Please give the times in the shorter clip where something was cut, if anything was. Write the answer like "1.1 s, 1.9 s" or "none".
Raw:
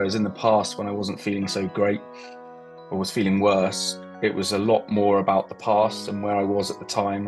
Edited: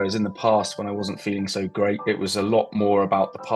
2.0 s